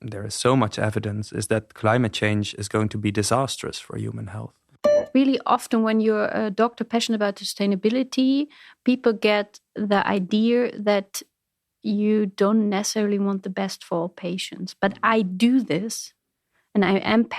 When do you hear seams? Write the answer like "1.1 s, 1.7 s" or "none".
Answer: 5.0 s